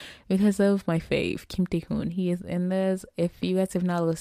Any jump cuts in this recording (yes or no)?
no